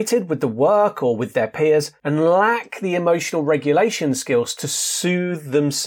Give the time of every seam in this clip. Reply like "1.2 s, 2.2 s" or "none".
2.0 s